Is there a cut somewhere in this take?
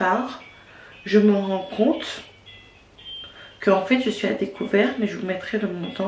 no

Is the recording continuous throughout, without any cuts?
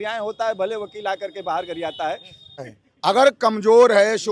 no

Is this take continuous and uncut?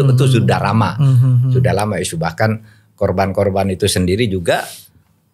yes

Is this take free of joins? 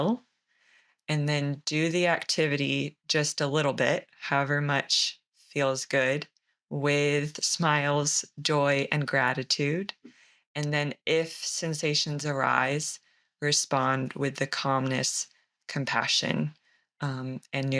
yes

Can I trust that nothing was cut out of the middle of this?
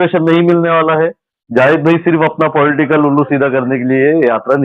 yes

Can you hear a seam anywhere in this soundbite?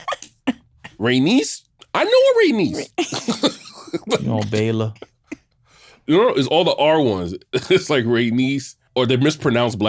yes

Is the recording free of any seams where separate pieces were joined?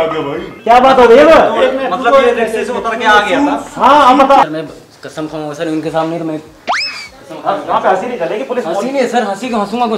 no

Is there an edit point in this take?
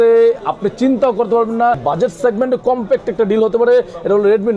yes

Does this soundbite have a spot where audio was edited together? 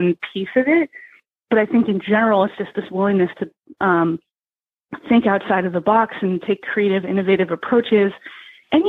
no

